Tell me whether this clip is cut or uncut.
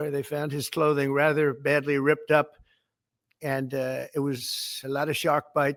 uncut